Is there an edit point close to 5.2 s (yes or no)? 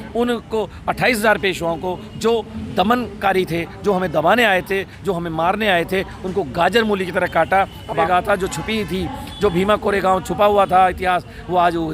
no